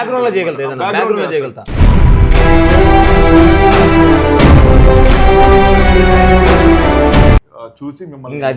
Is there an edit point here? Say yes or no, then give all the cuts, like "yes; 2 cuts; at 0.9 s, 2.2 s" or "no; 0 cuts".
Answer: yes; 1 cut; at 7.5 s